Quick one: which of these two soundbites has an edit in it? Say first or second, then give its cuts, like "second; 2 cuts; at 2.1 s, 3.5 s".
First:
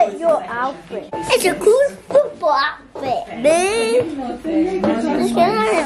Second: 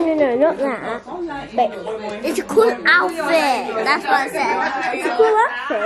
first; 1 cut; at 1.2 s